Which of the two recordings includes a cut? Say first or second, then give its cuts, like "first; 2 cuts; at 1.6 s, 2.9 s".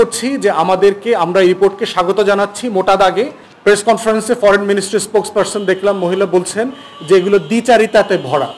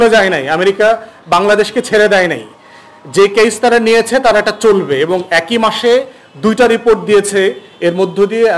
first; 1 cut; at 3.4 s